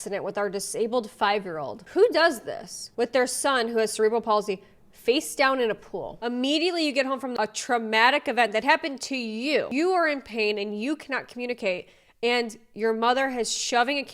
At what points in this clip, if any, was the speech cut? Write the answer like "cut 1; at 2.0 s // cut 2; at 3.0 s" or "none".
cut 1; at 1.7 s // cut 2; at 6.1 s // cut 3; at 7.3 s // cut 4; at 9.7 s